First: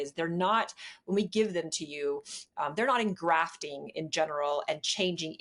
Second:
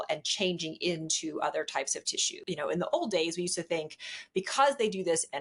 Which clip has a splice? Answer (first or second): second